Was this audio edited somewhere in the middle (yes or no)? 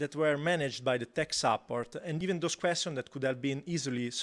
yes